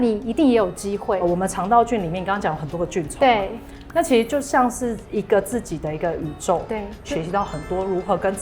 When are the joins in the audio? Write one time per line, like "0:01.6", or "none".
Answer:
0:01.2
0:07.1